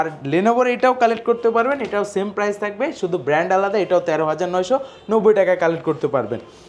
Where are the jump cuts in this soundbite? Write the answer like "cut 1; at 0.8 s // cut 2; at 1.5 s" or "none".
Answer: none